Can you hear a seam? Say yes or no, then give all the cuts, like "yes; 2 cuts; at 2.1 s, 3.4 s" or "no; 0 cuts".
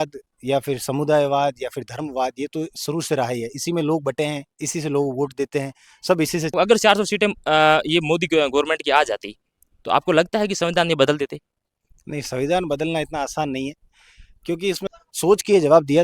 yes; 2 cuts; at 6.5 s, 14.8 s